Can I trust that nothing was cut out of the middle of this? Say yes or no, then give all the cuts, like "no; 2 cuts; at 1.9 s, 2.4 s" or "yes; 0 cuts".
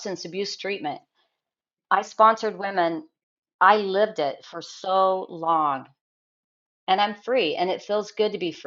yes; 0 cuts